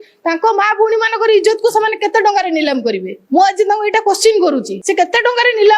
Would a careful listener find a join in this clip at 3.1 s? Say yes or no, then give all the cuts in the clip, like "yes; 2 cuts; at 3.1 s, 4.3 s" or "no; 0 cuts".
yes; 2 cuts; at 3.1 s, 4.8 s